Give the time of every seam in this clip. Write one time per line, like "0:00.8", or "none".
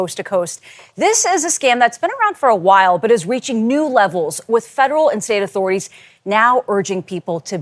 none